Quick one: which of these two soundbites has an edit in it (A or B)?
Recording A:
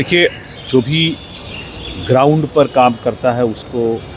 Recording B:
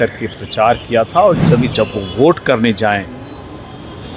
B